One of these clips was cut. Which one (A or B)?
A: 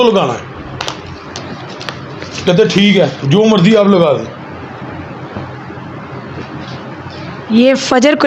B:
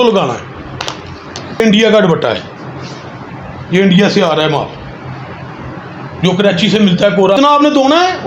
B